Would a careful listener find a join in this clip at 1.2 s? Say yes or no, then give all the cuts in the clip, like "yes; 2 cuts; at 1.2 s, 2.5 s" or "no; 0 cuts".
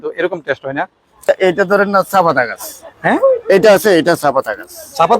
yes; 1 cut; at 1.2 s